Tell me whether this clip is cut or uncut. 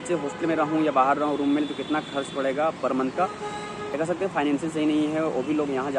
cut